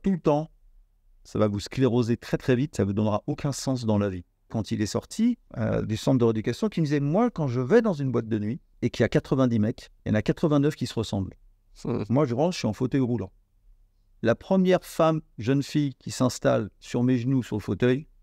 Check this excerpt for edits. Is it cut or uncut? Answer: cut